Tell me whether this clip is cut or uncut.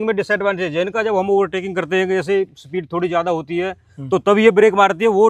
uncut